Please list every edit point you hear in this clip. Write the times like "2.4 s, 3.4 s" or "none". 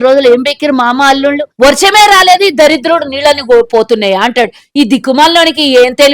1.5 s